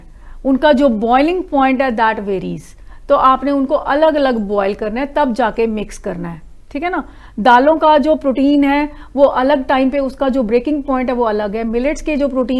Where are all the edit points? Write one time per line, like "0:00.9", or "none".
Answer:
none